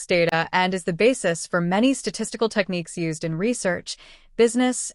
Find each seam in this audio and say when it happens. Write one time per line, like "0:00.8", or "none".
0:00.9

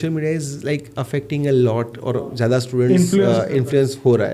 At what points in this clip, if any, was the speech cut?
none

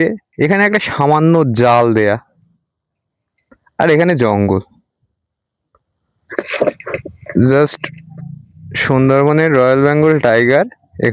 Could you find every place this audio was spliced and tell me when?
none

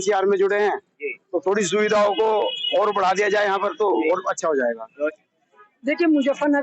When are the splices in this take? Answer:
0:05.1

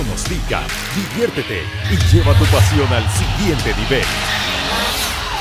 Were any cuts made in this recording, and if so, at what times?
none

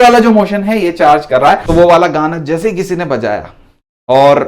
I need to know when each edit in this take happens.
0:01.6

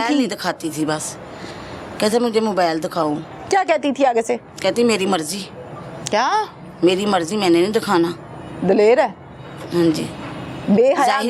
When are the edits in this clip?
none

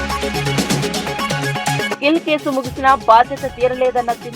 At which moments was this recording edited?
0:01.6

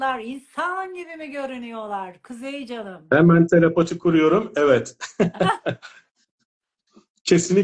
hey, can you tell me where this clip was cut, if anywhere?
none

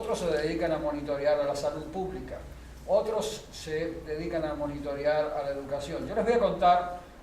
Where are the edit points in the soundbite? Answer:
0:03.0

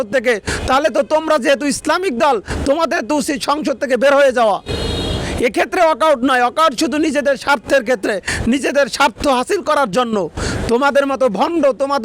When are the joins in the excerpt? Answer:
none

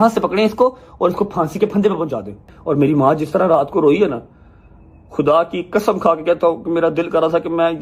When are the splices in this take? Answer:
0:02.5

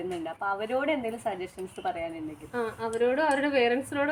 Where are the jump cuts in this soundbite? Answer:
none

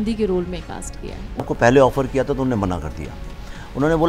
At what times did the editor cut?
0:01.5

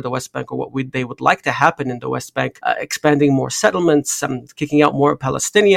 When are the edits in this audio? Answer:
none

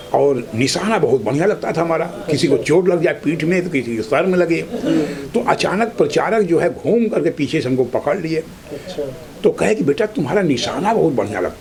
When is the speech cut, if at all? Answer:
none

